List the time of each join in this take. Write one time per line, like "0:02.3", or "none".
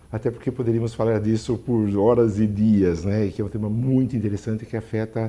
0:00.9